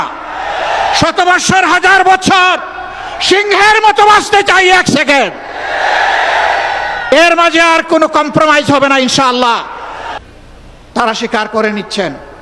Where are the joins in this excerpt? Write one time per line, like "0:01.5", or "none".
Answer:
0:10.2